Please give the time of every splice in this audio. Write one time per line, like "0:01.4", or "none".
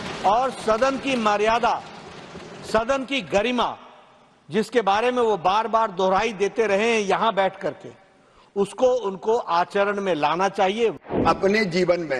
0:11.1